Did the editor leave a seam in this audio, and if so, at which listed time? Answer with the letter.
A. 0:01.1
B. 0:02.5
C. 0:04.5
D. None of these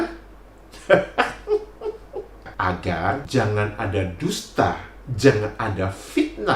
B